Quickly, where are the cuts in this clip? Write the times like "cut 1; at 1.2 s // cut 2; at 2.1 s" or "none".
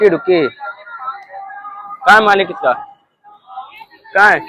none